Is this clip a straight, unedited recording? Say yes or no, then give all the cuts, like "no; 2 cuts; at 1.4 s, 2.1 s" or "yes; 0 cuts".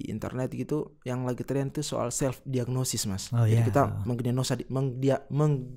yes; 0 cuts